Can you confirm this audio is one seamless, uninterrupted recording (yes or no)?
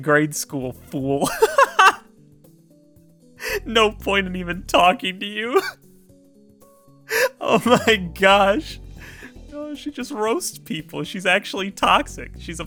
yes